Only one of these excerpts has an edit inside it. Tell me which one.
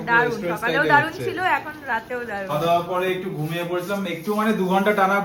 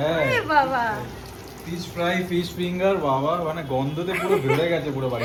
first; 1 cut; at 2.5 s

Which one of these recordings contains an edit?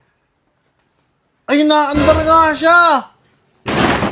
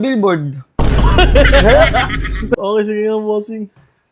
second; 1 cut; at 2.6 s

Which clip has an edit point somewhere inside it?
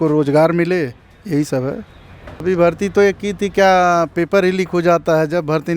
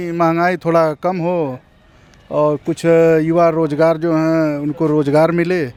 first; 1 cut; at 2.4 s

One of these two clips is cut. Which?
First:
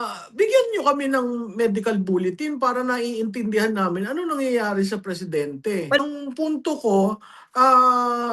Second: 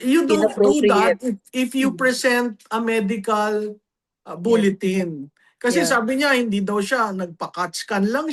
first; 1 cut; at 6.0 s

